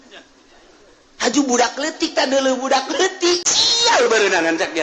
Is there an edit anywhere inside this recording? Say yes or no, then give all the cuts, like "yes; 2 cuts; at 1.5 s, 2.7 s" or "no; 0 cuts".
yes; 1 cut; at 3.5 s